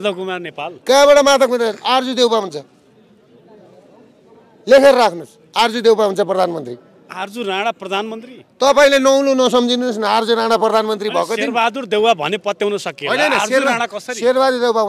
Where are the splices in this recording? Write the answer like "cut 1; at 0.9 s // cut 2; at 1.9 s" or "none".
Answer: none